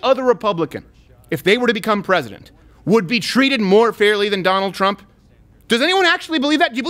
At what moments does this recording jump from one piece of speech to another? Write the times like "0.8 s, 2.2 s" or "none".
none